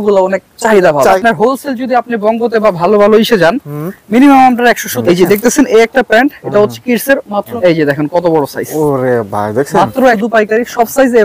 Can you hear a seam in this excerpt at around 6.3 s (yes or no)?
no